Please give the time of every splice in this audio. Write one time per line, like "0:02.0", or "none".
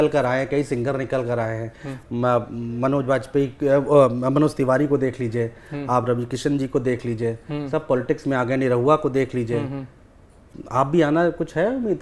none